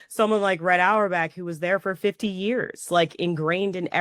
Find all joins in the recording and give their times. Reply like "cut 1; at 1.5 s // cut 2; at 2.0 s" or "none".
none